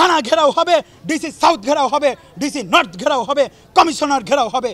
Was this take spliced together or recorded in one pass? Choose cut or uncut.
uncut